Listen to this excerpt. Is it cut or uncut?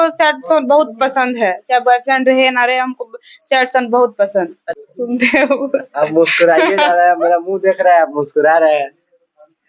cut